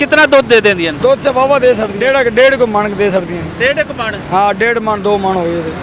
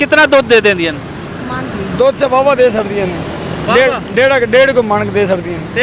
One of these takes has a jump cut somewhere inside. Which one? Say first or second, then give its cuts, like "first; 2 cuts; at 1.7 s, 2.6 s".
first; 2 cuts; at 0.9 s, 1.9 s